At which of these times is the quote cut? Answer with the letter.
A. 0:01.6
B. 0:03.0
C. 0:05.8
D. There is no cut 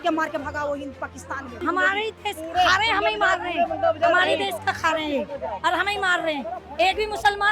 A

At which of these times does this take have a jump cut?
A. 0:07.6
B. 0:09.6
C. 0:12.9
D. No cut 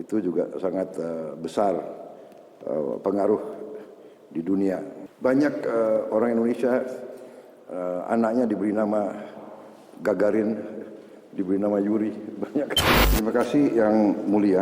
C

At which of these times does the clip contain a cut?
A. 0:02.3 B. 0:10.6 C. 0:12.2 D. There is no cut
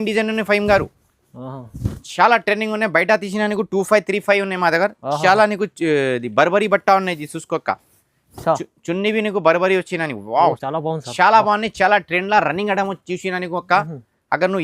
B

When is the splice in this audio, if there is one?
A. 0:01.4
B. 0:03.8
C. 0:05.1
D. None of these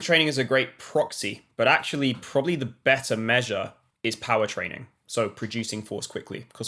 B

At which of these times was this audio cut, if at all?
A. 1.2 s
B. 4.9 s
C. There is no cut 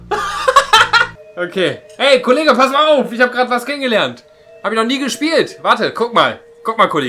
A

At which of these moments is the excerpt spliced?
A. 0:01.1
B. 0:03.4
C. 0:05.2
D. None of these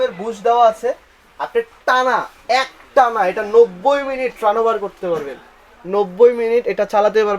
D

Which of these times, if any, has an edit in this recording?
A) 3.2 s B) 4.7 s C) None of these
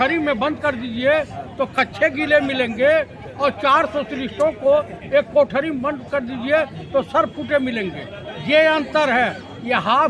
C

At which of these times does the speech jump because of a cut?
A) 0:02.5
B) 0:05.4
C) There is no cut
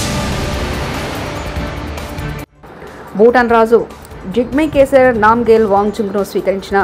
A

